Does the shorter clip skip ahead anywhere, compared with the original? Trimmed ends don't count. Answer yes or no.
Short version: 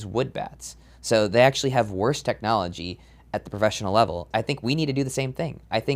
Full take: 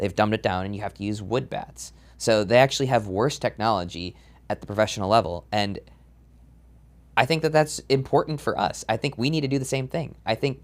yes